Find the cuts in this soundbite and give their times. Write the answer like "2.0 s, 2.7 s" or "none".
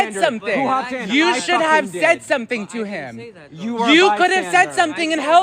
1.0 s